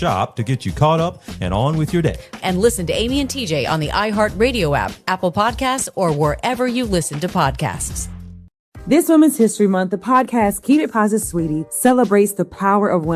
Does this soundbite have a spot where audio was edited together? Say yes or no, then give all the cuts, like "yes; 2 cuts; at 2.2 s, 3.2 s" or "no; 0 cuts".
yes; 1 cut; at 8.7 s